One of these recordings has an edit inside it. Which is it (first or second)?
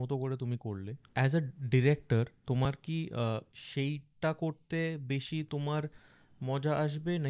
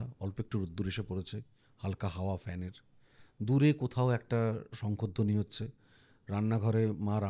first